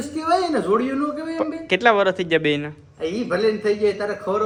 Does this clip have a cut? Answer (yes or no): no